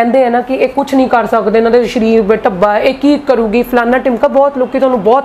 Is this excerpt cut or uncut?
uncut